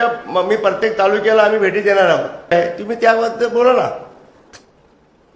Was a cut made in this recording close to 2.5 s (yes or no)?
yes